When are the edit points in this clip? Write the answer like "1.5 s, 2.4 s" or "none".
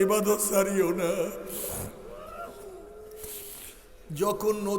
none